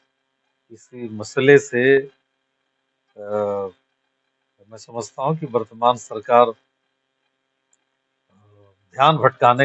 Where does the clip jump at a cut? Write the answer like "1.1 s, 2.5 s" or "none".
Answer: none